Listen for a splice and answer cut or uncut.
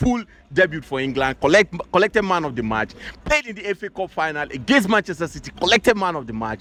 uncut